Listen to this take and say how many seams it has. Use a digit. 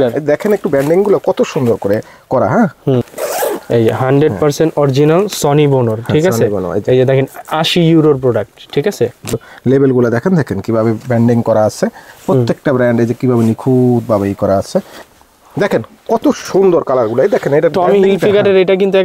3